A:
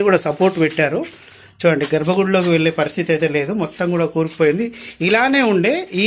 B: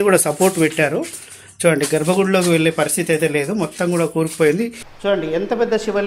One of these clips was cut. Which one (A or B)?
B